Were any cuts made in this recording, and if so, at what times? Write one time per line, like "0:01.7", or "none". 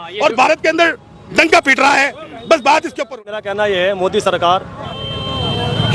0:03.5